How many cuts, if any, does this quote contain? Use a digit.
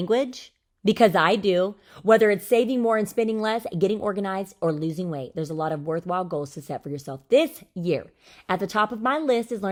0